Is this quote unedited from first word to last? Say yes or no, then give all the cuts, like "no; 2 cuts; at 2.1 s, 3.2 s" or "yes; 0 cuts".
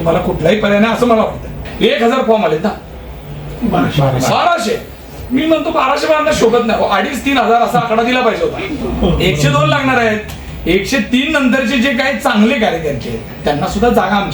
no; 2 cuts; at 1.6 s, 8.7 s